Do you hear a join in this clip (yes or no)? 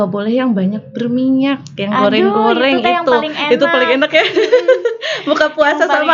no